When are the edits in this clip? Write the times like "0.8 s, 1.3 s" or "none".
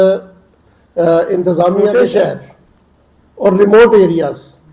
1.9 s